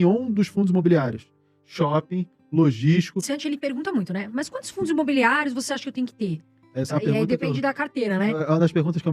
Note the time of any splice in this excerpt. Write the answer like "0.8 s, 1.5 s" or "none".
3.3 s